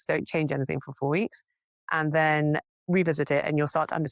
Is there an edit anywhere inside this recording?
no; 0 cuts

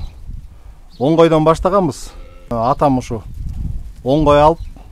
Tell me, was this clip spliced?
yes; 1 cut; at 2.5 s

